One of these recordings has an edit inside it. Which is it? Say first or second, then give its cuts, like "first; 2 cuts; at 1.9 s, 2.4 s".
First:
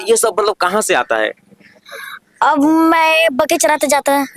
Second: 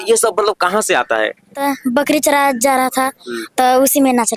second; 1 cut; at 1.6 s